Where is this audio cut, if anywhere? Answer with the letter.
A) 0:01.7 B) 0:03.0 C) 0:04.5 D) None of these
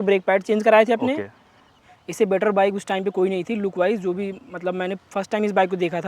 A